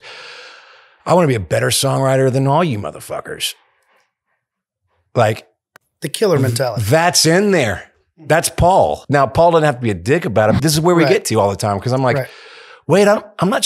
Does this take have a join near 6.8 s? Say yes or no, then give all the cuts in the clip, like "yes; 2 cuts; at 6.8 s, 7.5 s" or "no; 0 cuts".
no; 2 cuts; at 9.0 s, 10.6 s